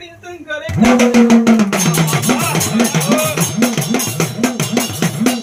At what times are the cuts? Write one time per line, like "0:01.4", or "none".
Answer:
none